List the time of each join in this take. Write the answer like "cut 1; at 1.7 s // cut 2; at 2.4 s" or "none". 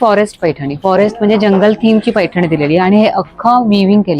none